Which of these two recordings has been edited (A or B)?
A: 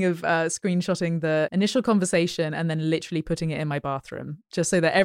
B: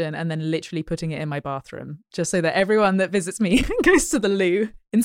A